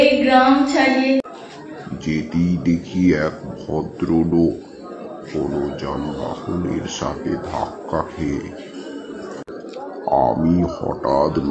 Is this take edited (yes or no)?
yes